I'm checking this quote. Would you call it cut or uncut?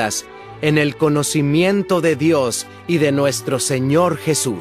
cut